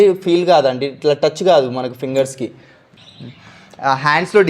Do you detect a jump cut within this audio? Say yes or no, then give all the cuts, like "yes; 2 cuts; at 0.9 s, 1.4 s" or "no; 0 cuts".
yes; 1 cut; at 3.0 s